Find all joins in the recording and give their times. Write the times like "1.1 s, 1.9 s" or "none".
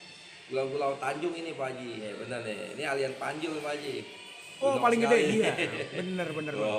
2.1 s